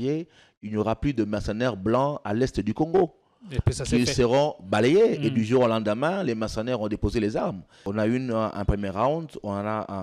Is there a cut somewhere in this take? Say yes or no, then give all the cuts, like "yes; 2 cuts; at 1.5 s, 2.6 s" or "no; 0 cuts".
yes; 1 cut; at 7.7 s